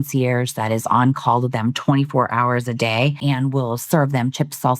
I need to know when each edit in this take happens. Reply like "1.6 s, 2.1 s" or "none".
3.2 s